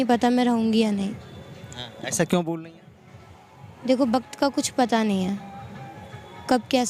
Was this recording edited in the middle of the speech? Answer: no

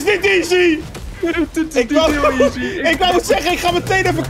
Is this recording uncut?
yes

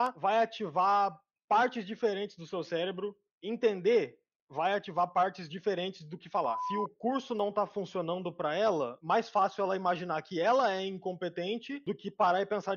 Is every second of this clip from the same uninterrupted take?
no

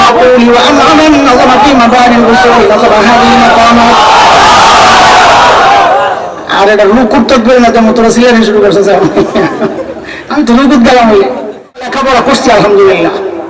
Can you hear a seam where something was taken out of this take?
yes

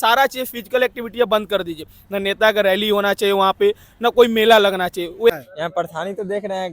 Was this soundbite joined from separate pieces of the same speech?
yes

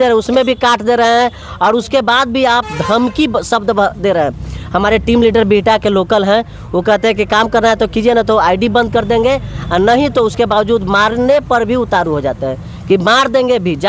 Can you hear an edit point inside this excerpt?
no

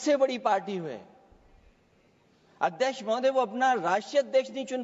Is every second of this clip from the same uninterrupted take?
yes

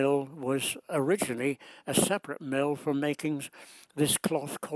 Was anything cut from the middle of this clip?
no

